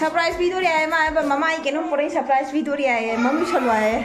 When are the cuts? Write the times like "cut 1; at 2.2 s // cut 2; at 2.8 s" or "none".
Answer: none